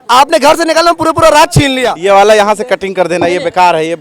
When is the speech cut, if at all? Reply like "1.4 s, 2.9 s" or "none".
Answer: 1.9 s